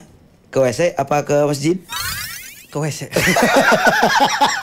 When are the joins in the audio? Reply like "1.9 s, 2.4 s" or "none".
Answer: none